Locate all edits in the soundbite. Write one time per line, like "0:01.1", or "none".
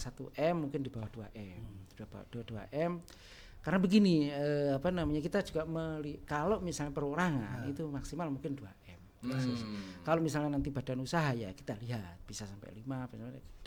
none